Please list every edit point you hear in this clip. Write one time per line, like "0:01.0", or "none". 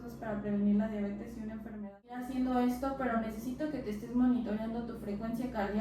0:02.2